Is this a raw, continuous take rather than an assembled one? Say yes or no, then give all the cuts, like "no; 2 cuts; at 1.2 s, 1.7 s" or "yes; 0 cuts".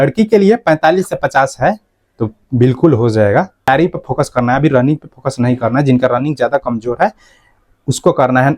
no; 1 cut; at 3.7 s